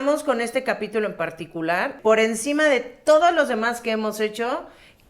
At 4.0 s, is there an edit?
no; 1 cut; at 2.0 s

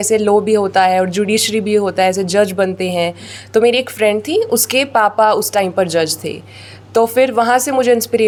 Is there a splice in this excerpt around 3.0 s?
no; 0 cuts

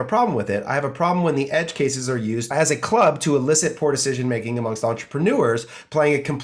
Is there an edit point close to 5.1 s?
no; 1 cut; at 2.5 s

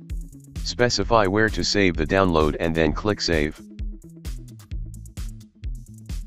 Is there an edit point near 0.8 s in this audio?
yes; 3 cuts; at 0.8 s, 3.5 s, 4.9 s

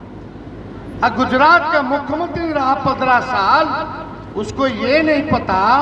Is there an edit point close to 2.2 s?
no; 0 cuts

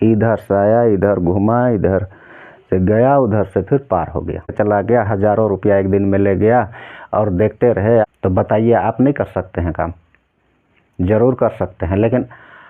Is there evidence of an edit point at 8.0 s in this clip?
yes; 2 cuts; at 4.5 s, 8.0 s

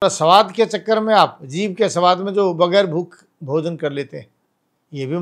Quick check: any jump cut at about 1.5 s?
no; 0 cuts

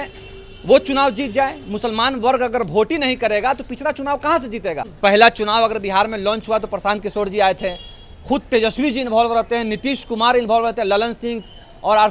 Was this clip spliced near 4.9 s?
yes; 1 cut; at 4.9 s

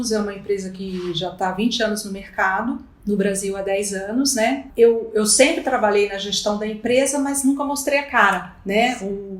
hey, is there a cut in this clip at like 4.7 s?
yes; 2 cuts; at 2.9 s, 4.7 s

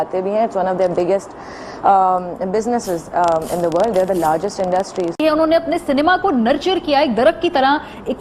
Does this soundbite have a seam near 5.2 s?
yes; 1 cut; at 5.2 s

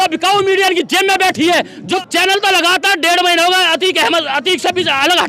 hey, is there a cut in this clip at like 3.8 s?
no; 1 cut; at 1.8 s

